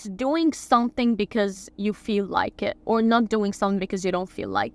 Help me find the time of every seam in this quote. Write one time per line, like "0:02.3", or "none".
none